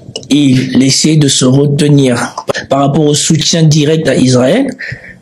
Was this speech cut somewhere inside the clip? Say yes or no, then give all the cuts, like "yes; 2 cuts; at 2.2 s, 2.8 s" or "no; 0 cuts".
yes; 1 cut; at 2.4 s